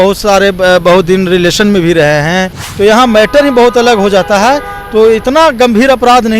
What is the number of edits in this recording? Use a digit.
1